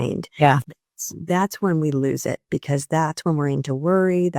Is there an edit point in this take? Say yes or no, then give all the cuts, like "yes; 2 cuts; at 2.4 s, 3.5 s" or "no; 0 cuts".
no; 0 cuts